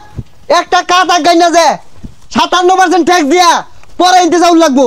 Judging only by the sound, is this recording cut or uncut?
uncut